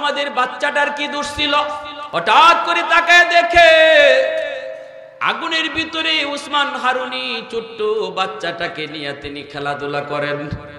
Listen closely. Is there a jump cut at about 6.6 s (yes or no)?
no